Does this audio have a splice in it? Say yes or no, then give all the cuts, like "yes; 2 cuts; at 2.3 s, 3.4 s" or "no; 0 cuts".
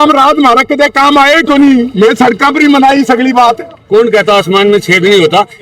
yes; 1 cut; at 3.8 s